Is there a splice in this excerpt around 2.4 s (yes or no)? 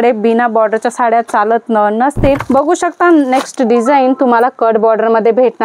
yes